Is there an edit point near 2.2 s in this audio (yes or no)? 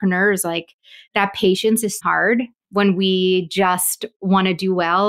yes